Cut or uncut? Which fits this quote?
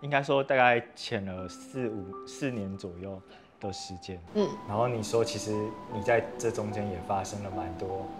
uncut